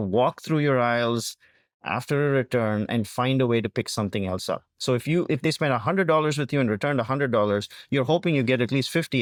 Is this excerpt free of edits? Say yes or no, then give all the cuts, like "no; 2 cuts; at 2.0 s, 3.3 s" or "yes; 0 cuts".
yes; 0 cuts